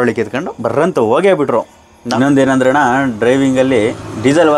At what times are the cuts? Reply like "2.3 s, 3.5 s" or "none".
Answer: 2.0 s